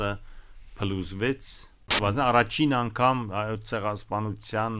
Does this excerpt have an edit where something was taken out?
yes; 1 cut; at 2.0 s

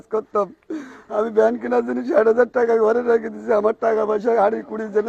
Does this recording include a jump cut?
no; 0 cuts

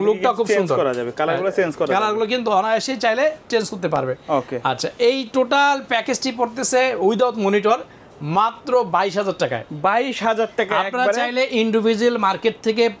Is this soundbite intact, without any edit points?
yes; 0 cuts

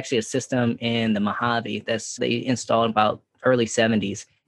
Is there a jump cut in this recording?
no; 0 cuts

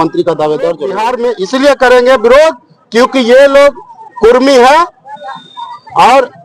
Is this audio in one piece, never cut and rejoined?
no; 1 cut; at 1.1 s

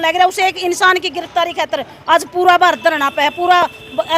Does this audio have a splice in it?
no; 0 cuts

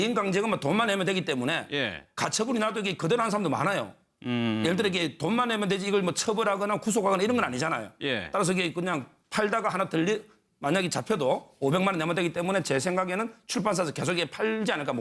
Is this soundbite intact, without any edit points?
no; 1 cut; at 3.3 s

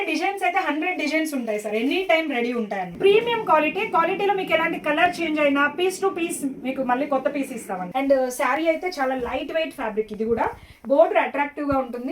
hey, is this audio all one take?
no; 2 cuts; at 2.9 s, 7.8 s

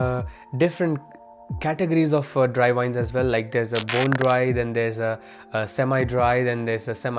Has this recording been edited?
no; 0 cuts

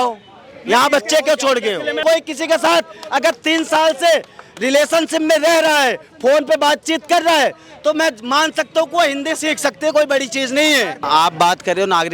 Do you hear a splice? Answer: yes; 2 cuts; at 2.0 s, 11.0 s

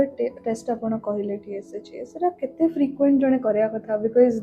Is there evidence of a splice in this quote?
no; 0 cuts

